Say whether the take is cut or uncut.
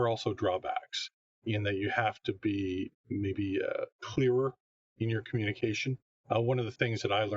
cut